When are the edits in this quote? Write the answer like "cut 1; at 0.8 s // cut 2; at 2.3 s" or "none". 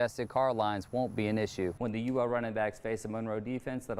cut 1; at 1.8 s